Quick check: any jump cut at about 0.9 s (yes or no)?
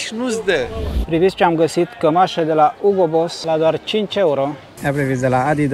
yes